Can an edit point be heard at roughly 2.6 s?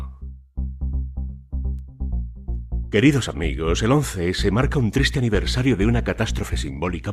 yes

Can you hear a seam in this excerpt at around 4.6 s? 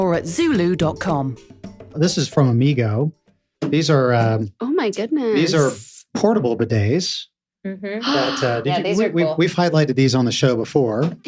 no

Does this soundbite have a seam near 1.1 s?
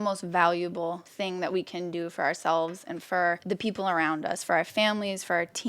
yes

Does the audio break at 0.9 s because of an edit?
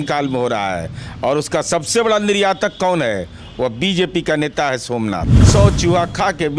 no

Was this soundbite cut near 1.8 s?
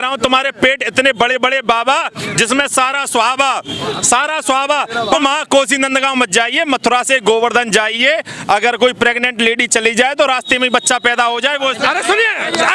no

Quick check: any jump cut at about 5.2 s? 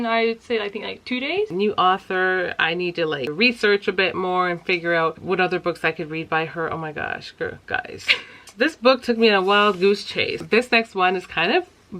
yes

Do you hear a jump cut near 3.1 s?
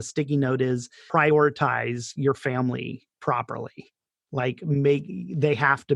no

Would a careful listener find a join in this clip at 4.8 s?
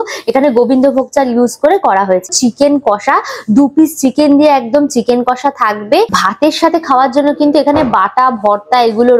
no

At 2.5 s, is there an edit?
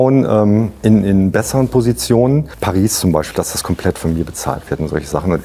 yes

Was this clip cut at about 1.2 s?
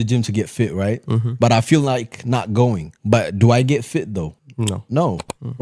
no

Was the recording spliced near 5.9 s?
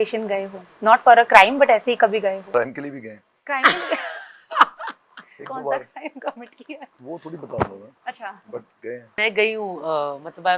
no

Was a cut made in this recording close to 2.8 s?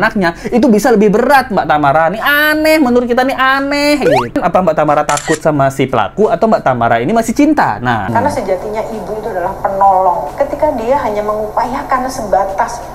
no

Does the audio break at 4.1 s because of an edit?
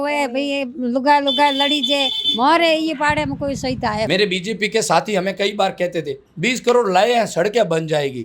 yes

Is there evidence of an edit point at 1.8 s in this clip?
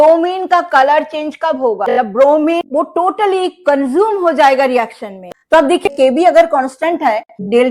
yes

